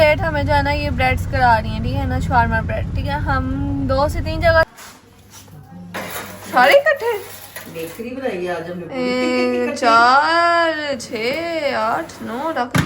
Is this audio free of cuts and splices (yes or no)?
no